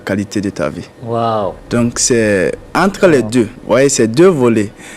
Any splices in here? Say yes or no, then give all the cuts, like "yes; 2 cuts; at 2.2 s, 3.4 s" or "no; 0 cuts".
yes; 4 cuts; at 0.9 s, 1.6 s, 2.6 s, 3.6 s